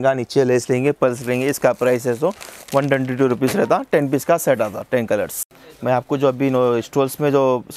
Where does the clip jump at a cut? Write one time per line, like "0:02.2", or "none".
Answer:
none